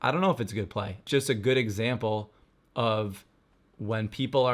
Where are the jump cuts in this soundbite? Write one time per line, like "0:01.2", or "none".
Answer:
0:01.0